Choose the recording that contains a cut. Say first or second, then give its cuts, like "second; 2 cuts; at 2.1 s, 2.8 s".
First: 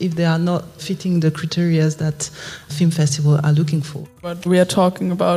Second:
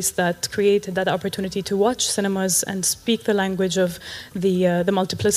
first; 3 cuts; at 0.8 s, 2.7 s, 4.5 s